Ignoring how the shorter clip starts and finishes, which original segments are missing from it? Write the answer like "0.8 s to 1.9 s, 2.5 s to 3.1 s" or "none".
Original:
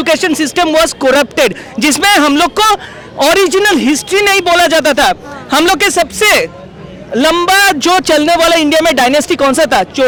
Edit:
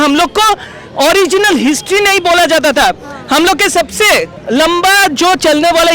6.6 s to 7.0 s